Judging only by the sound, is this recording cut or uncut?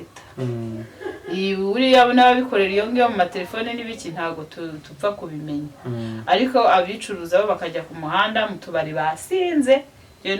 uncut